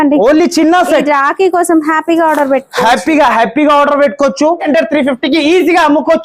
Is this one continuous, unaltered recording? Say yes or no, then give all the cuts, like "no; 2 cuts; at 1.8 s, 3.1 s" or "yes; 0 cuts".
no; 1 cut; at 4.7 s